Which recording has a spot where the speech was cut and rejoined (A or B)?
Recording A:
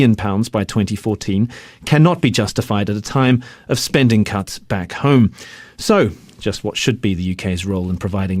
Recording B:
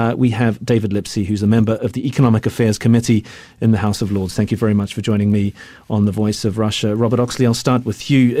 A